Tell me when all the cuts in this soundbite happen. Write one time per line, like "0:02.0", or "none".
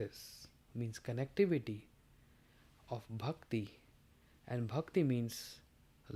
none